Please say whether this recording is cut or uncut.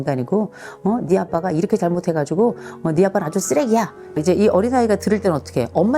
cut